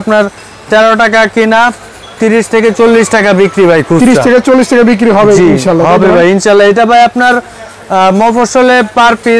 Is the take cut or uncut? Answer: uncut